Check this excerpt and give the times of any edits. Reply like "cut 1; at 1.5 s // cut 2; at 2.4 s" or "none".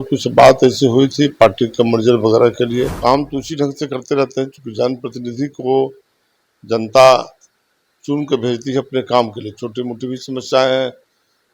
cut 1; at 2.9 s